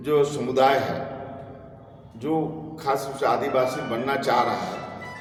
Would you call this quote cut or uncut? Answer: uncut